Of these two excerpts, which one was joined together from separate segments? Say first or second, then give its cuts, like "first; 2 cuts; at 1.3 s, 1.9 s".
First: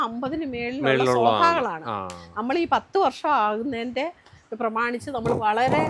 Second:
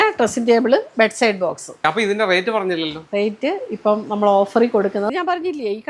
second; 2 cuts; at 1.8 s, 5.1 s